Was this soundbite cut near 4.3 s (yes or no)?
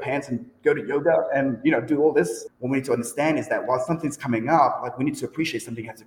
no